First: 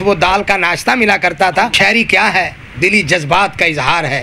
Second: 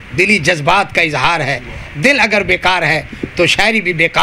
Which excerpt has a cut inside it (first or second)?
first